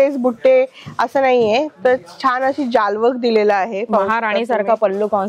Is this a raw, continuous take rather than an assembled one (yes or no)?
yes